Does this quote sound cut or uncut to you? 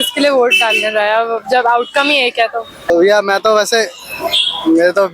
cut